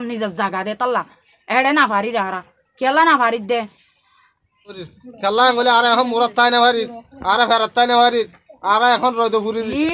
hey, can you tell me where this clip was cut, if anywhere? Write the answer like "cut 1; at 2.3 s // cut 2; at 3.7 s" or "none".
cut 1; at 4.9 s